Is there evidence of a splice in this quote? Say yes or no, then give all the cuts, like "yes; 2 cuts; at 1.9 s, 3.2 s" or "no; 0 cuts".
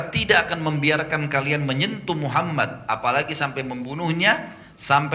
no; 0 cuts